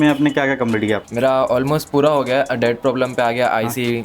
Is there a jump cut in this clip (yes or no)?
yes